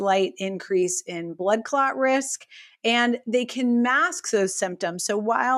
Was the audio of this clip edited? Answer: no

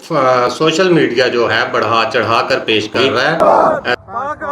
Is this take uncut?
no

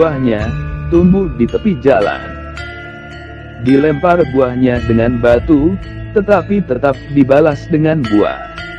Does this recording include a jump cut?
no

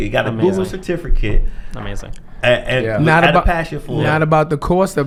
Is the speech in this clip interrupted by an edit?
no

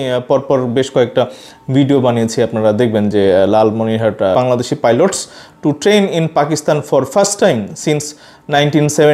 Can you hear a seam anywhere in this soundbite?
yes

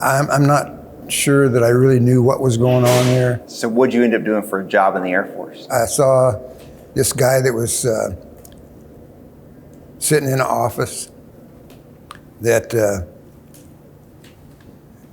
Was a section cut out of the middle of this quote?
yes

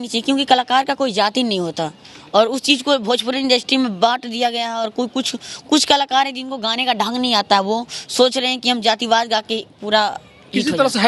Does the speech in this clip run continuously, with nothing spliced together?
yes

